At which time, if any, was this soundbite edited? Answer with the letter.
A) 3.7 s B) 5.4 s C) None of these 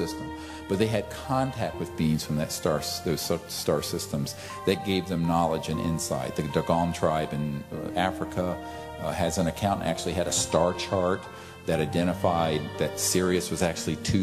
B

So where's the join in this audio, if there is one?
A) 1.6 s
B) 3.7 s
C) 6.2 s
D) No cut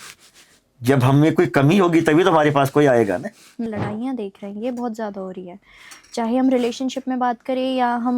B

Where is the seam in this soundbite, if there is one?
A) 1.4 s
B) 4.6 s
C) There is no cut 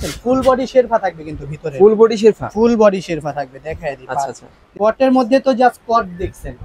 B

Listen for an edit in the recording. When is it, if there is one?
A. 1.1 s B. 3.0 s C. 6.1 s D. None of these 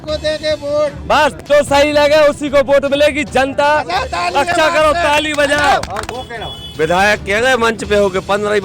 C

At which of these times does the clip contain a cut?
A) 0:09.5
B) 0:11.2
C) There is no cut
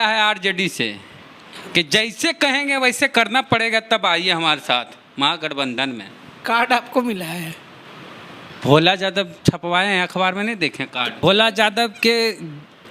B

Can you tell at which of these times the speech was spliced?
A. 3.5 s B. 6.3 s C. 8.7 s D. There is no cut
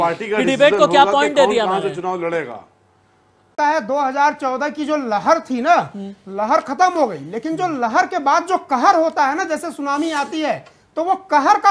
A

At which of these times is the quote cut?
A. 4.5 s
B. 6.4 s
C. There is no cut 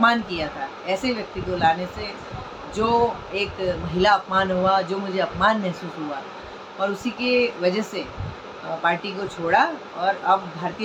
C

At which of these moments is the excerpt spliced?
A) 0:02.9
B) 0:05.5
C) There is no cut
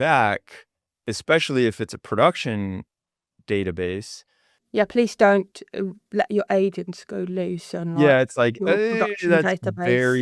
C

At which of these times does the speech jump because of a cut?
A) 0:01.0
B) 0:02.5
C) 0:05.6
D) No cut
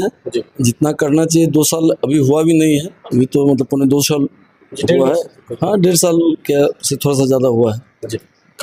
D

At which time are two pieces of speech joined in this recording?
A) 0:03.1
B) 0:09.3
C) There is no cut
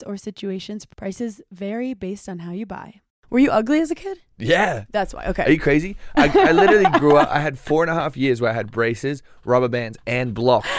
A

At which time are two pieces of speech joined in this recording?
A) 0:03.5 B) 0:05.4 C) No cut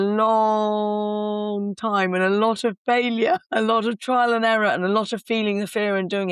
C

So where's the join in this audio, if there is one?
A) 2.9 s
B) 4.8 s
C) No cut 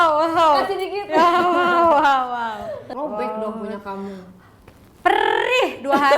A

